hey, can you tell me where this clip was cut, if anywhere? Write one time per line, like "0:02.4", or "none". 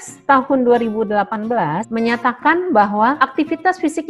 0:01.8
0:03.2